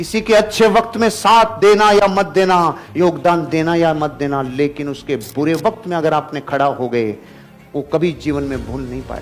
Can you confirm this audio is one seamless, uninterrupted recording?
yes; 0 cuts

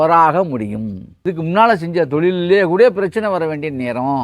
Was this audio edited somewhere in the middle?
yes; 1 cut; at 1.2 s

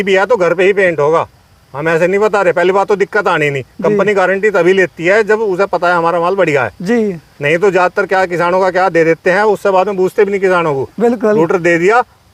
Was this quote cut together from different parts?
no; 0 cuts

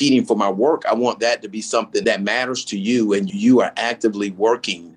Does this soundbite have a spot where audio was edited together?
yes; 2 cuts; at 2.0 s, 3.3 s

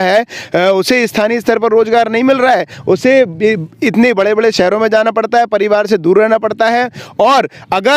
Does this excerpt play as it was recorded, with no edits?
yes; 0 cuts

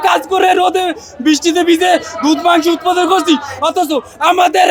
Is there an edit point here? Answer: no; 0 cuts

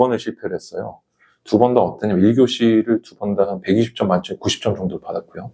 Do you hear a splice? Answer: no; 0 cuts

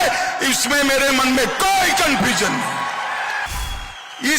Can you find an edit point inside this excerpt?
yes; 1 cut; at 3.5 s

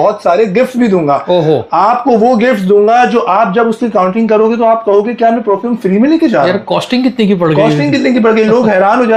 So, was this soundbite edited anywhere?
no; 0 cuts

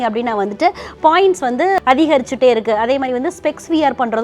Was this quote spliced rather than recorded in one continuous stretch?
yes; 1 cut; at 1.8 s

